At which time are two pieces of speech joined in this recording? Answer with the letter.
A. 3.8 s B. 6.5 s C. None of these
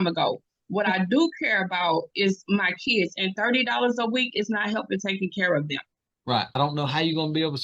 B